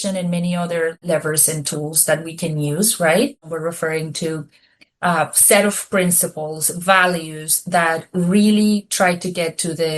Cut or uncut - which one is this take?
cut